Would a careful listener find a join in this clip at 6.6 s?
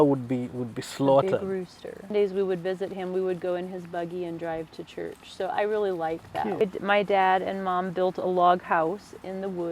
yes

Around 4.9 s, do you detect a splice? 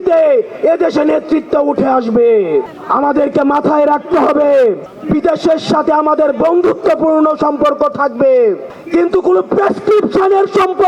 yes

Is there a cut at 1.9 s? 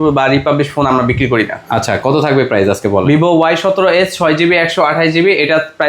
no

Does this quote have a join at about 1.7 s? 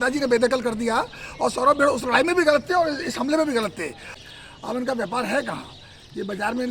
no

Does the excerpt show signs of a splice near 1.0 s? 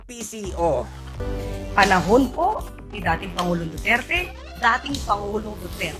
yes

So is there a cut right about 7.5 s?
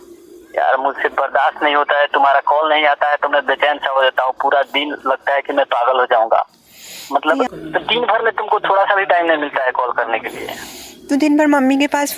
yes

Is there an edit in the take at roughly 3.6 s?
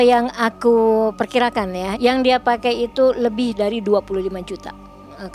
no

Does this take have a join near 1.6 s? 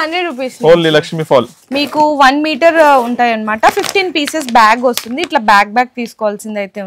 yes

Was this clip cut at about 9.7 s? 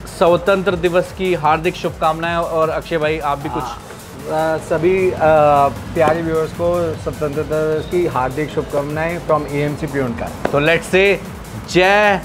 no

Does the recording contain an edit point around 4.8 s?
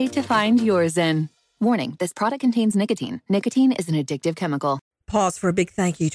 yes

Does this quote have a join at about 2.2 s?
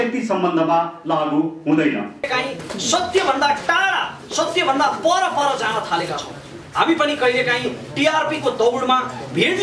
yes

